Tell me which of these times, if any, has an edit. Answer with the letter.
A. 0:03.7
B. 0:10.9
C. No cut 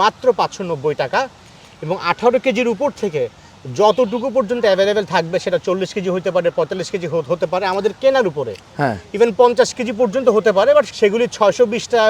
B